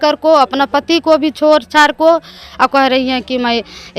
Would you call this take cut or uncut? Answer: cut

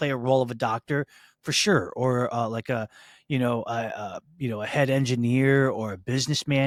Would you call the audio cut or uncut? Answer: uncut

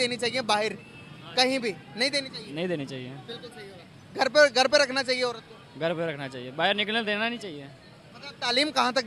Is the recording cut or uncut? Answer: uncut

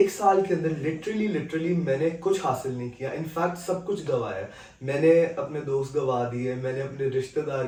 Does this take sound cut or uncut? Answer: uncut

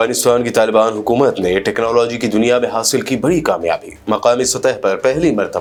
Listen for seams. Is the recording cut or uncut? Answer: uncut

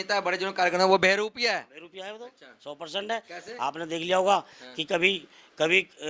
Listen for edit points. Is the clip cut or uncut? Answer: uncut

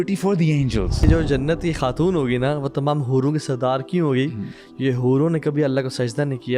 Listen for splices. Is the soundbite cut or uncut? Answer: cut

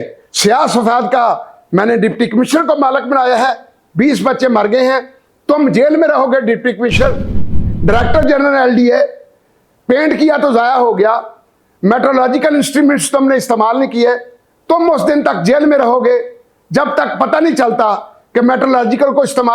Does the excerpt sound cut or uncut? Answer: cut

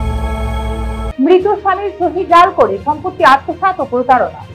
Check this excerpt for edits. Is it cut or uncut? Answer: cut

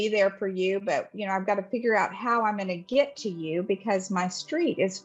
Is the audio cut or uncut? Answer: uncut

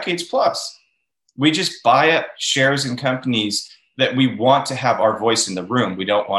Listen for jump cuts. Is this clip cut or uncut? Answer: uncut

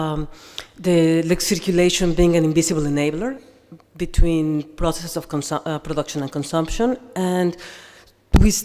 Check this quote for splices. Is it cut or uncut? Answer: cut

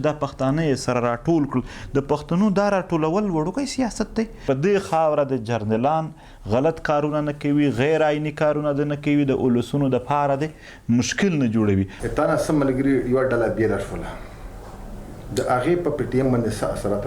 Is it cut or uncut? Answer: cut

